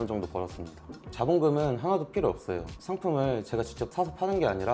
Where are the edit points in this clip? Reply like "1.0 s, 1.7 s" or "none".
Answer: 0.9 s